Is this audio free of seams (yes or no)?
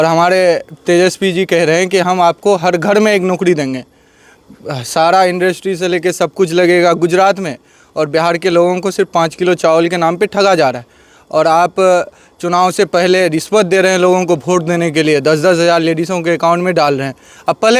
yes